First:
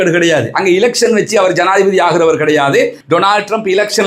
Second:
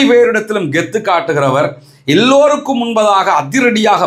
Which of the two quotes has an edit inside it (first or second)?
first